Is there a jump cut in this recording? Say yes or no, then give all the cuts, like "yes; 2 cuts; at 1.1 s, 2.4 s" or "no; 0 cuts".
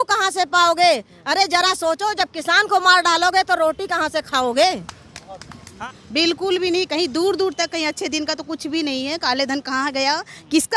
yes; 1 cut; at 5.7 s